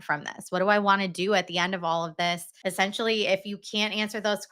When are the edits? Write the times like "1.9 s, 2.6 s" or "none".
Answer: 2.5 s